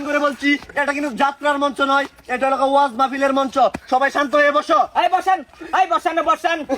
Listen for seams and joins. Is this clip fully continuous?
yes; 0 cuts

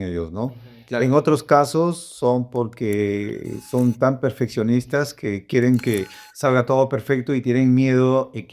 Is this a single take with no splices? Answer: yes; 0 cuts

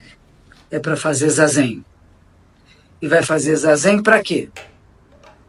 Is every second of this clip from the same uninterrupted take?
yes; 0 cuts

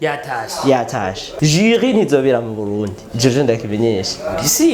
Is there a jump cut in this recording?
yes; 1 cut; at 1.2 s

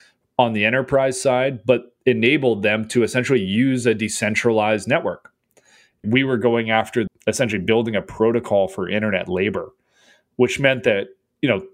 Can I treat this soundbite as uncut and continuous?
no; 2 cuts; at 6.0 s, 7.1 s

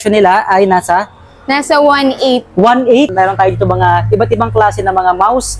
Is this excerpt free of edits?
no; 1 cut; at 3.1 s

